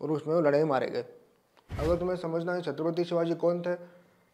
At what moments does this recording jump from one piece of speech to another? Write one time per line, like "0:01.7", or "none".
0:01.7